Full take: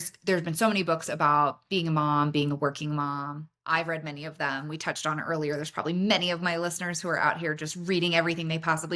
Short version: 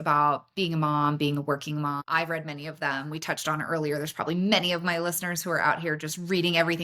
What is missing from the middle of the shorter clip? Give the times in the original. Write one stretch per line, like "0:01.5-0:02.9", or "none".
0:03.2-0:03.6